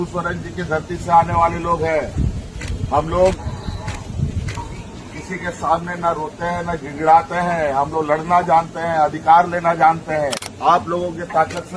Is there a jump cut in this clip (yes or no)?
yes